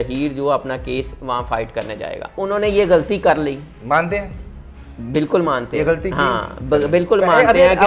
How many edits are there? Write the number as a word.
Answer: one